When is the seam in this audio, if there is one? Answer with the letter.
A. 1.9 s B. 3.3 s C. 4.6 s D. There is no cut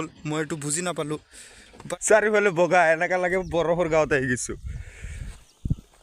A